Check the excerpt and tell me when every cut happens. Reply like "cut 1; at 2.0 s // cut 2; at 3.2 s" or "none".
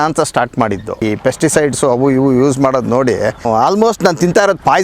cut 1; at 1.0 s // cut 2; at 3.4 s